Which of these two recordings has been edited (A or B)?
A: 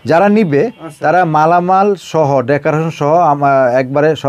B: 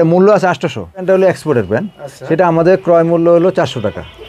B